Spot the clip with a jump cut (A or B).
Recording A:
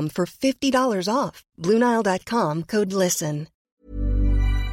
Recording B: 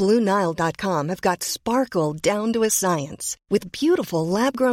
A